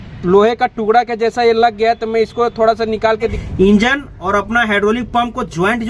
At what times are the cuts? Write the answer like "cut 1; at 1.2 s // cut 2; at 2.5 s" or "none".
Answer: cut 1; at 3.4 s

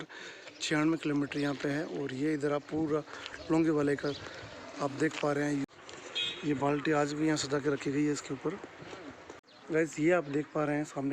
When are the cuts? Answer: cut 1; at 5.6 s // cut 2; at 9.5 s

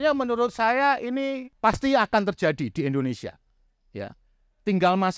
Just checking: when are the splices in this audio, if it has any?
cut 1; at 1.5 s

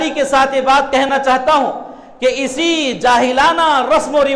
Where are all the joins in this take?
cut 1; at 1.1 s

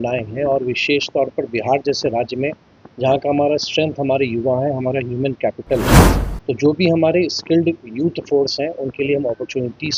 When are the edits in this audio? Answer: none

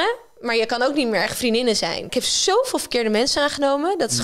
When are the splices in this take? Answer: cut 1; at 2.1 s

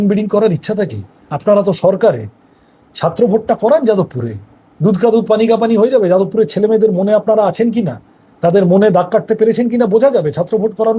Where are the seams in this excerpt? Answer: none

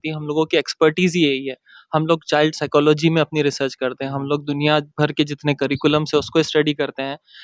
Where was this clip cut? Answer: none

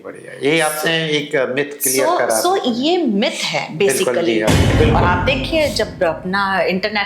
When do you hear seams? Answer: cut 1; at 4.7 s

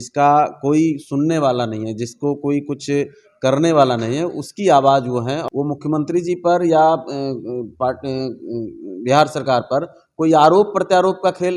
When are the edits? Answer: cut 1; at 5.4 s

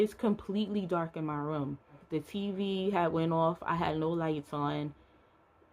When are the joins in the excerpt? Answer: cut 1; at 2.0 s

